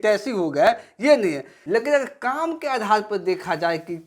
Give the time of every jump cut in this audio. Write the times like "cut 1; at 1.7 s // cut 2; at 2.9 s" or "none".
cut 1; at 1.5 s